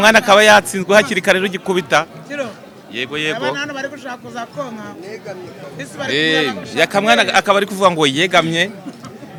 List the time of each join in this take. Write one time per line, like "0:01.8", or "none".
none